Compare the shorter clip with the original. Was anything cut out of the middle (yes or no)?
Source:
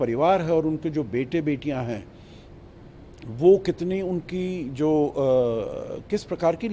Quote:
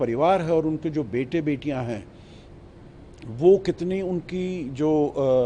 no